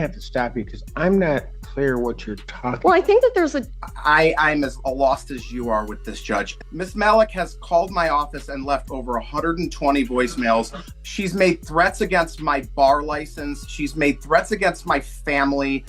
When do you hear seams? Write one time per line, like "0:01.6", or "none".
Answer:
0:03.6
0:06.6
0:10.8